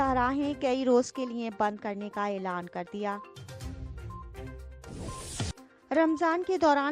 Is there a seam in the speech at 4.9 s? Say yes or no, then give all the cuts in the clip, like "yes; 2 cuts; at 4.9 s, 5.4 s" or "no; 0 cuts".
yes; 2 cuts; at 3.2 s, 4.9 s